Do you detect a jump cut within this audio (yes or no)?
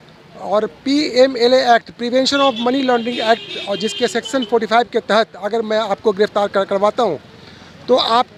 no